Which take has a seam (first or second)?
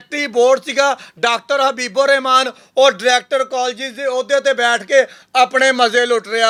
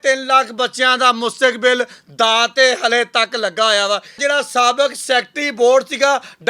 second